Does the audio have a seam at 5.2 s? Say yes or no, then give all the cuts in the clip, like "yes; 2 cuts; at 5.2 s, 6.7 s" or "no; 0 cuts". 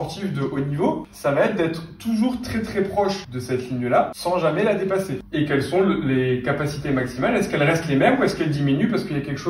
yes; 4 cuts; at 1.1 s, 3.3 s, 4.1 s, 5.2 s